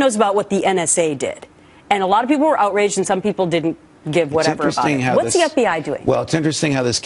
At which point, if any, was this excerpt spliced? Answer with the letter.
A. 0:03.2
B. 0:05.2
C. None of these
A